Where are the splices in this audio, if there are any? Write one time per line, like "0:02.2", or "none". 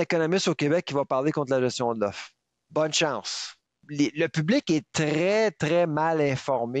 0:03.9